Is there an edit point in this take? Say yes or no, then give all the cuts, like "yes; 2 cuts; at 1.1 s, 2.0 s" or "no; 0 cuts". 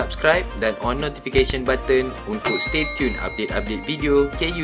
no; 0 cuts